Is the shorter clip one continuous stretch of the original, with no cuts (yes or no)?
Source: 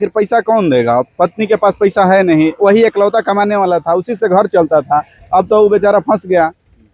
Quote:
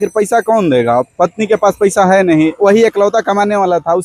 yes